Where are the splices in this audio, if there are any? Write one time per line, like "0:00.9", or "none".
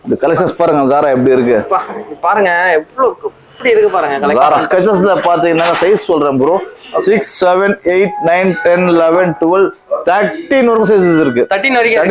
0:04.6

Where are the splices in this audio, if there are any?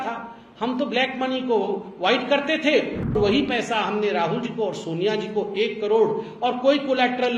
0:03.1

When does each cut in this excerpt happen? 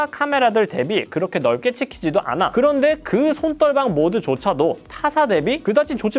none

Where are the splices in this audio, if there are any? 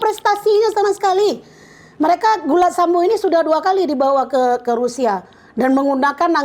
none

